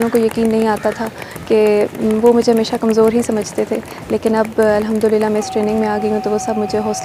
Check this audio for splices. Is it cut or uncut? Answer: uncut